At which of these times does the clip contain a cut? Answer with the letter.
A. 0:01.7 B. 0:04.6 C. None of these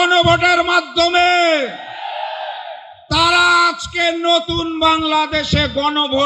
C